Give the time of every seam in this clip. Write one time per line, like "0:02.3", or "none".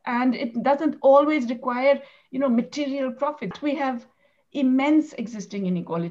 0:03.6